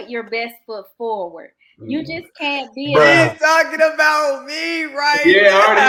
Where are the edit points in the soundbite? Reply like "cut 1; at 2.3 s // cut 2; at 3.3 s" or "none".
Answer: none